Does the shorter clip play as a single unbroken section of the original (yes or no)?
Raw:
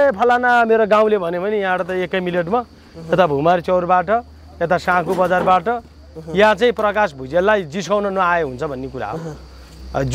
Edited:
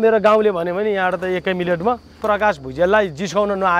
no